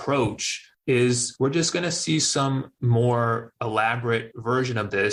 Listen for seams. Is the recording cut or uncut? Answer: uncut